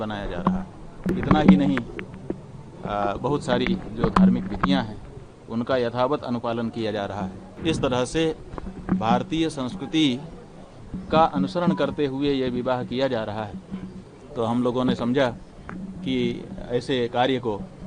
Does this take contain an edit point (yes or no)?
yes